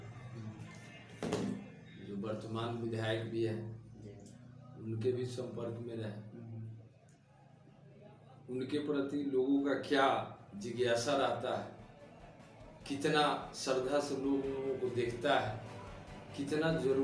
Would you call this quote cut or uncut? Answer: uncut